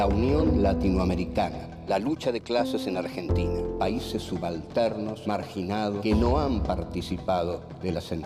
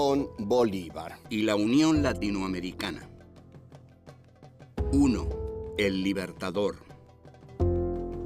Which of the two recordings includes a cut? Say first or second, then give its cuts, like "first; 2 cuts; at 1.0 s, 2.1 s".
second; 1 cut; at 5.9 s